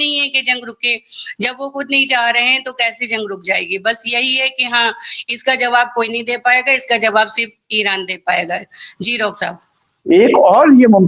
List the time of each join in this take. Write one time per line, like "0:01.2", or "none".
0:09.9